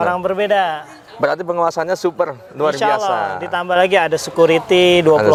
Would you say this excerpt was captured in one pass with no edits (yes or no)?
yes